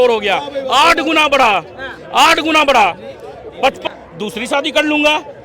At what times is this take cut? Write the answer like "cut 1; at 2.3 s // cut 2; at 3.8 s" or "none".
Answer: cut 1; at 3.8 s